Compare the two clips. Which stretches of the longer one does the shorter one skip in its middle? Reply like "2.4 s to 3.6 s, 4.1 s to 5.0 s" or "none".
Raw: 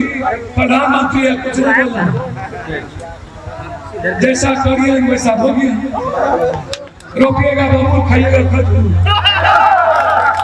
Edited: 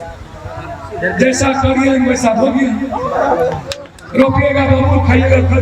none